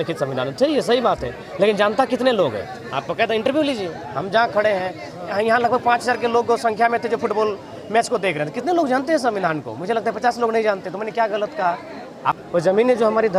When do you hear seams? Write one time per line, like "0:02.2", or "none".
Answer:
0:12.4